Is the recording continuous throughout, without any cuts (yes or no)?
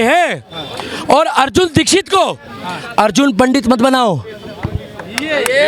yes